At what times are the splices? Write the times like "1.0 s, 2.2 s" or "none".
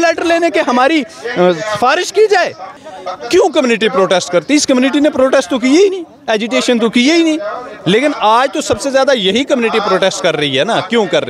2.8 s